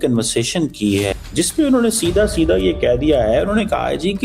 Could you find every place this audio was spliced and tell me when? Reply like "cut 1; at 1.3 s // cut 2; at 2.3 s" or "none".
cut 1; at 1.1 s